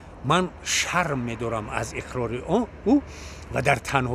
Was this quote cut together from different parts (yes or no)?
no